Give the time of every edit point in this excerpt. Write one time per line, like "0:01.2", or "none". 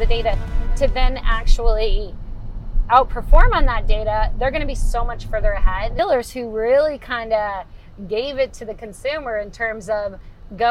0:06.0